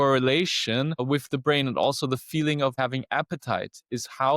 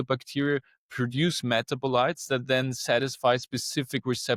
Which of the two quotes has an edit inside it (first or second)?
first